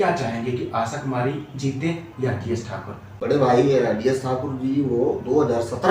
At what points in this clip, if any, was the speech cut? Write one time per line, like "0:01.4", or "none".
0:03.1